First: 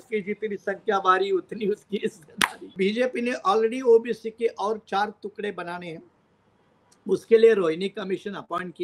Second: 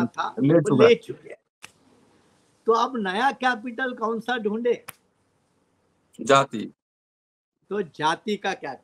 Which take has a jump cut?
first; 1 cut; at 2.7 s

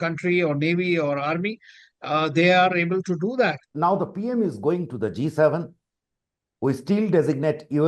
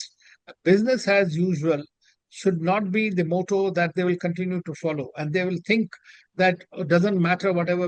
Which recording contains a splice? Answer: first; 1 cut; at 3.6 s

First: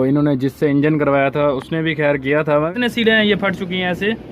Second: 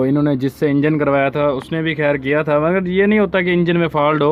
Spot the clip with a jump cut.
first; 1 cut; at 2.7 s

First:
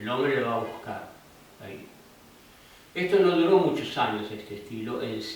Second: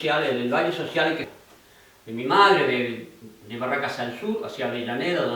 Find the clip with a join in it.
second; 1 cut; at 1.3 s

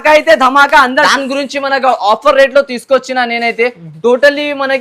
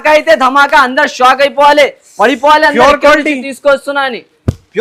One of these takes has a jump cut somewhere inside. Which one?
first; 1 cut; at 1.1 s

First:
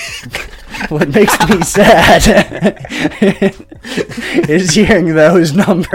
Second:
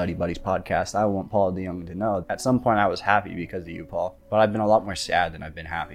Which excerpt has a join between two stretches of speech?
second; 2 cuts; at 2.2 s, 4.2 s

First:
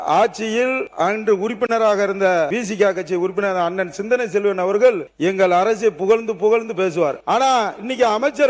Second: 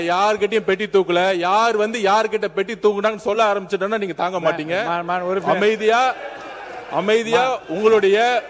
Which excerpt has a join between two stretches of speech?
first; 4 cuts; at 0.9 s, 2.5 s, 5.1 s, 7.2 s

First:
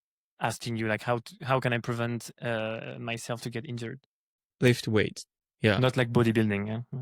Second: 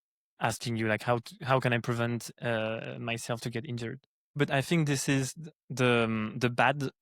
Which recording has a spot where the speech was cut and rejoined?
second; 1 cut; at 4.4 s

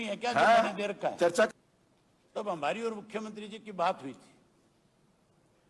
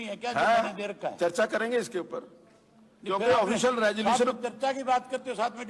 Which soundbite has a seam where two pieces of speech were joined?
first; 1 cut; at 1.5 s

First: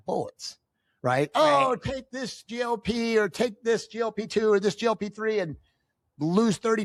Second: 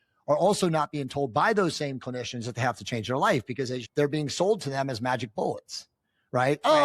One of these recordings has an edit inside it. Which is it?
second; 1 cut; at 3.8 s

